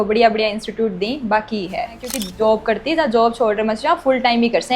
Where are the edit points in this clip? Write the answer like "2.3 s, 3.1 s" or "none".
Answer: 2.2 s